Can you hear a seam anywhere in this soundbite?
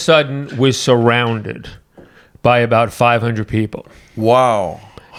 no; 0 cuts

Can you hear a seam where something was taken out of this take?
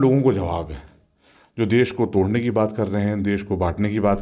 no; 0 cuts

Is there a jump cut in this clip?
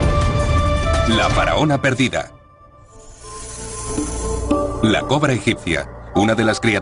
yes; 1 cut; at 2.2 s

